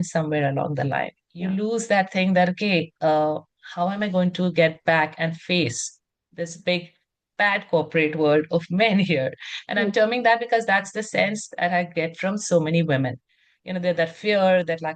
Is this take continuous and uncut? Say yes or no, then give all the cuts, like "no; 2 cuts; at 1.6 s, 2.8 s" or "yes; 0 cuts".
yes; 0 cuts